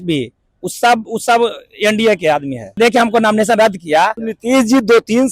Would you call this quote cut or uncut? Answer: cut